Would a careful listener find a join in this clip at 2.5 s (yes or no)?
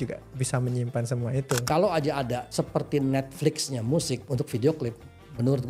yes